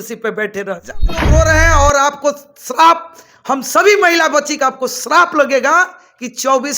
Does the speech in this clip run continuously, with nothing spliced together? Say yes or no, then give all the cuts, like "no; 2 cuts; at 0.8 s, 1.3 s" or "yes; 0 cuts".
no; 1 cut; at 1.3 s